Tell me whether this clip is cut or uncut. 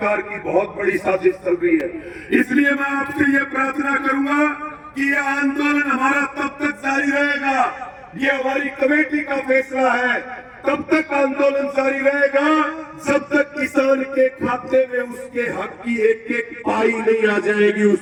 uncut